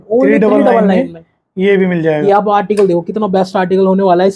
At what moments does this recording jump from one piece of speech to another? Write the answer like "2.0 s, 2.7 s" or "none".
2.2 s

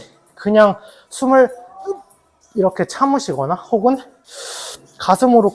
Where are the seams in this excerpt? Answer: none

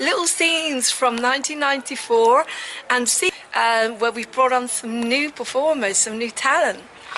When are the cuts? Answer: none

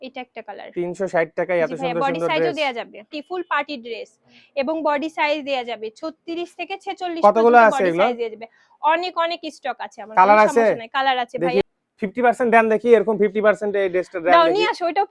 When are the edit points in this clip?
3.2 s, 11.6 s

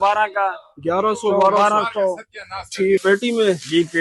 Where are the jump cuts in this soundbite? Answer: 3.0 s

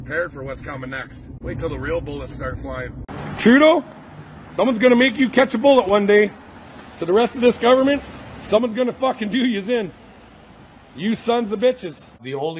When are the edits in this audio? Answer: 1.2 s

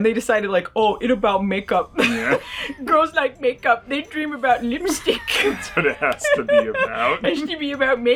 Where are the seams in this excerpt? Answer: none

